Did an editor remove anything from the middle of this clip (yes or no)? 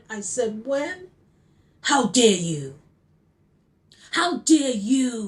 no